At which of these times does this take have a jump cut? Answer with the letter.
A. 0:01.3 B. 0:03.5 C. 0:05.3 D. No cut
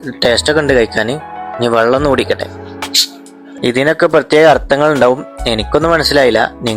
B